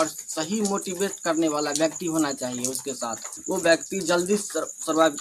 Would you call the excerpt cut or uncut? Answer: cut